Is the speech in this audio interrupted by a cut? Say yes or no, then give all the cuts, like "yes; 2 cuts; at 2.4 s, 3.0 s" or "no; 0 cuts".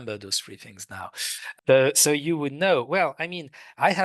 yes; 1 cut; at 1.5 s